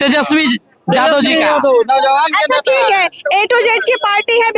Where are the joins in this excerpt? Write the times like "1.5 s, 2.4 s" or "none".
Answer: none